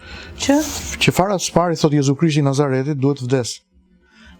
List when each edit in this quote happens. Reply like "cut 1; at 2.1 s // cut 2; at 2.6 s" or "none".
none